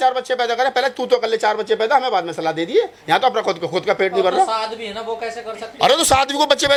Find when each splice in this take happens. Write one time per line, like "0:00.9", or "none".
none